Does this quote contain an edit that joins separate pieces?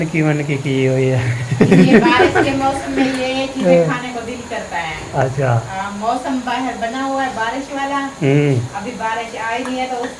no; 0 cuts

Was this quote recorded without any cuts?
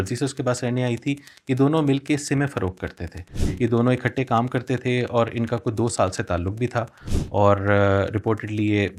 yes; 0 cuts

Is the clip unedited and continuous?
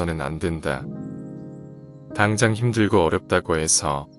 yes; 0 cuts

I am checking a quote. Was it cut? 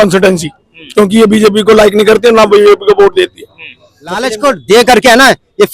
yes; 1 cut; at 4.3 s

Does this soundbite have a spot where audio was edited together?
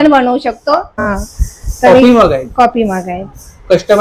yes; 1 cut; at 1.0 s

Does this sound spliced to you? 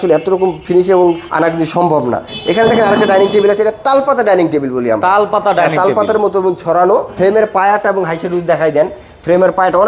yes; 3 cuts; at 1.3 s, 2.3 s, 7.1 s

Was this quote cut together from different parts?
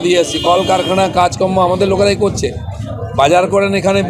no; 0 cuts

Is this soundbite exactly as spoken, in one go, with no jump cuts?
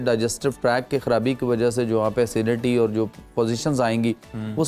yes; 0 cuts

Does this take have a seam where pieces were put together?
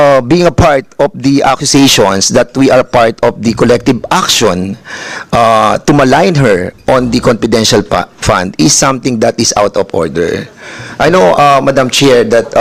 no; 0 cuts

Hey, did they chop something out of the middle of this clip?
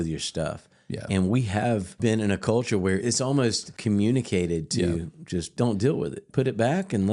yes; 4 cuts; at 2.0 s, 3.3 s, 5.5 s, 6.2 s

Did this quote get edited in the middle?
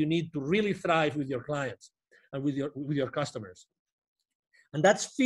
no; 0 cuts

